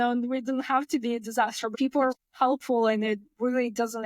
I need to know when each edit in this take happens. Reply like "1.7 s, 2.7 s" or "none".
1.7 s